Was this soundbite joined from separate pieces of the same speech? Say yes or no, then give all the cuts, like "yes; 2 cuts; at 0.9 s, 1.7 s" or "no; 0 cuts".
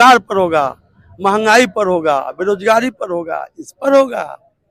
no; 0 cuts